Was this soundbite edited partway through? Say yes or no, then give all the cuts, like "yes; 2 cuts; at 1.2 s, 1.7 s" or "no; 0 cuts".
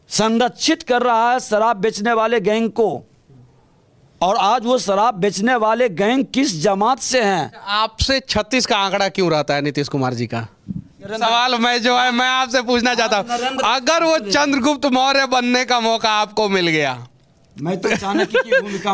yes; 2 cuts; at 7.6 s, 11.1 s